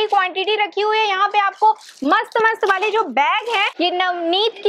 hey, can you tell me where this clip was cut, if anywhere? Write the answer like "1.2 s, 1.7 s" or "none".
3.7 s